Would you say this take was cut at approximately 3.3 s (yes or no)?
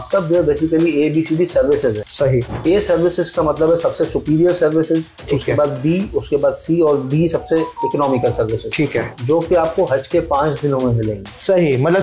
no